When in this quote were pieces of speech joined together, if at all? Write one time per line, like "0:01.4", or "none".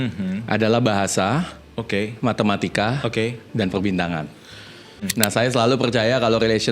0:05.1